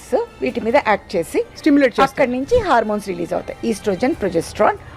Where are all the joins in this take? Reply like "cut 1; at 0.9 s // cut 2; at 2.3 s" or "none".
none